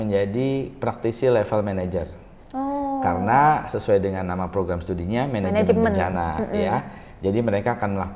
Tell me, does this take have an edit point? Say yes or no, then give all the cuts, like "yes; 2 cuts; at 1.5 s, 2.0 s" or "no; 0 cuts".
no; 0 cuts